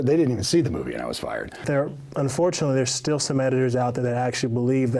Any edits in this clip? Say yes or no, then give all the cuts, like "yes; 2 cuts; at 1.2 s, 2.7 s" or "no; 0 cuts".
yes; 1 cut; at 1.6 s